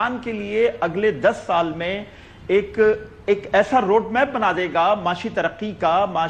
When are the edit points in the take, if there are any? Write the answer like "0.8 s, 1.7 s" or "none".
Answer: none